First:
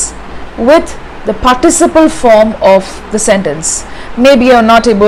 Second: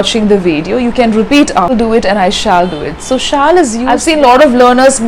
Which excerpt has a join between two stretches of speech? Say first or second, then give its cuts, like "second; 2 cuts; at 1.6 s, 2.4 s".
second; 2 cuts; at 1.7 s, 3.9 s